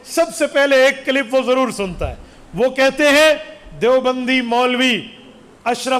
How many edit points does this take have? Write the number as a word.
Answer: zero